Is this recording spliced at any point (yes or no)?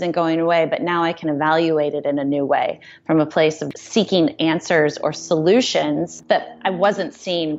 yes